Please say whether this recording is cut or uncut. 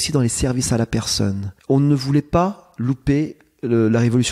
cut